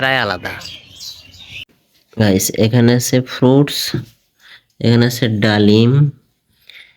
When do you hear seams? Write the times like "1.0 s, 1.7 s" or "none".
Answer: 1.6 s